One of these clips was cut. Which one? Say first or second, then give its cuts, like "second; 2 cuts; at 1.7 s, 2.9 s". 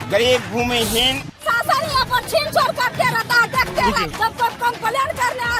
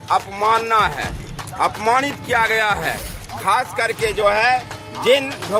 first; 1 cut; at 1.4 s